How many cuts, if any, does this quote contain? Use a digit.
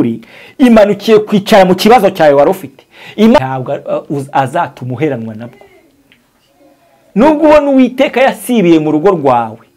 1